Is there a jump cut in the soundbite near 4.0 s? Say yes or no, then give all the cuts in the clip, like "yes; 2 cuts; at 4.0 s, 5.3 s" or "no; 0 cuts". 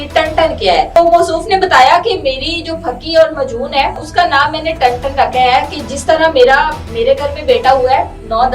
yes; 2 cuts; at 1.0 s, 4.0 s